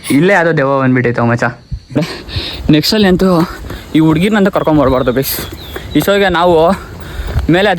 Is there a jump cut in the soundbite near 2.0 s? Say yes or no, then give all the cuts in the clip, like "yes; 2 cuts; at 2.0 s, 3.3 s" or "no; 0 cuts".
yes; 1 cut; at 2.0 s